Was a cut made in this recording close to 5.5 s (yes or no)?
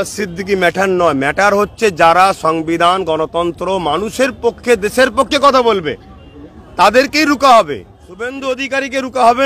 no